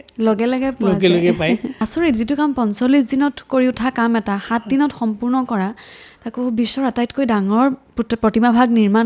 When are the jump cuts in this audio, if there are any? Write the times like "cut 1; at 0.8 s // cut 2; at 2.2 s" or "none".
cut 1; at 1.7 s